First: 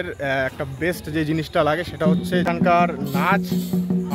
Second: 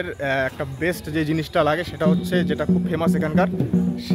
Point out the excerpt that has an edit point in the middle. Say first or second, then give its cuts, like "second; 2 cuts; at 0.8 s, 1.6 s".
first; 1 cut; at 2.5 s